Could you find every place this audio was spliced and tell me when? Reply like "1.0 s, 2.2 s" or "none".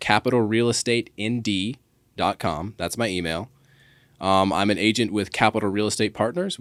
none